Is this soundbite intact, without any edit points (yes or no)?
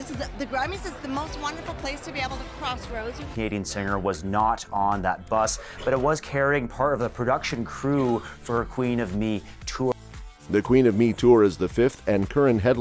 yes